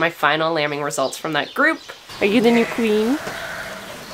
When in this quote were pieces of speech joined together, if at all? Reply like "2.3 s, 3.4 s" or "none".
2.0 s